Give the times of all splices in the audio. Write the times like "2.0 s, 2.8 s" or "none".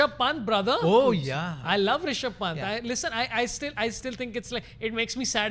none